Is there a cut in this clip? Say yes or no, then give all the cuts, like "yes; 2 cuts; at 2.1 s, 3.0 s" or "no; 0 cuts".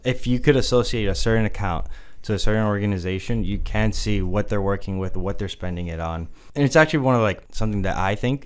yes; 2 cuts; at 6.4 s, 7.5 s